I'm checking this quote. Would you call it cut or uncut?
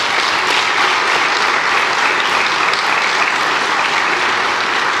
uncut